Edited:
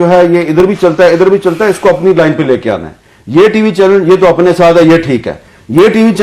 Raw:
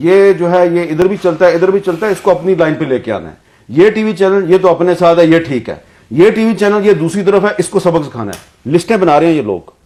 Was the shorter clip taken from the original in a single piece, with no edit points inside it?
yes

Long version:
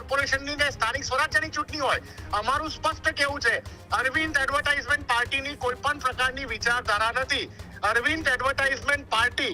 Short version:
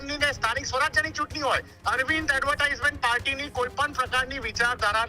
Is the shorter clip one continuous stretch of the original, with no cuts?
no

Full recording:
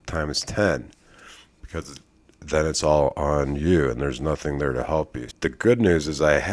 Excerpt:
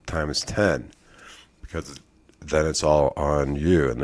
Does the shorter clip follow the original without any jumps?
yes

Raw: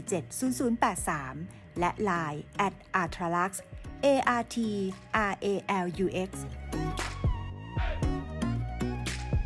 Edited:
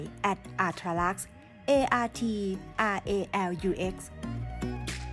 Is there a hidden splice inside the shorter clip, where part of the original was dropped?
yes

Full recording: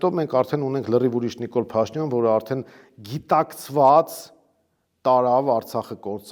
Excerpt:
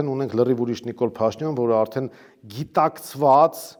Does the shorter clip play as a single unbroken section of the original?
yes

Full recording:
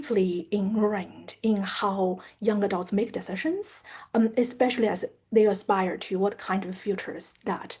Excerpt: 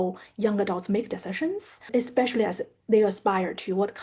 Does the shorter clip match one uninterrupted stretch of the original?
no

